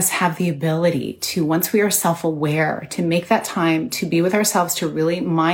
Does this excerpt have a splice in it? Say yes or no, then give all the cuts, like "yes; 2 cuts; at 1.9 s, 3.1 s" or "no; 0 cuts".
no; 0 cuts